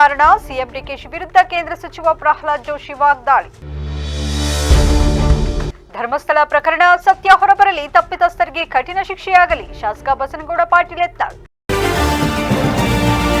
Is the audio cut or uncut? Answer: cut